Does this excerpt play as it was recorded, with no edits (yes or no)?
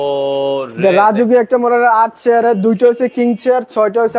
yes